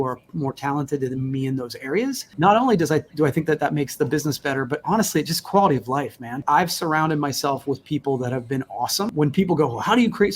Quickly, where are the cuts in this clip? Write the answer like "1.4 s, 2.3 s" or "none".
2.3 s, 6.4 s, 9.1 s